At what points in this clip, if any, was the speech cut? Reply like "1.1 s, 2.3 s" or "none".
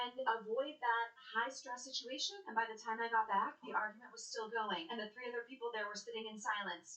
none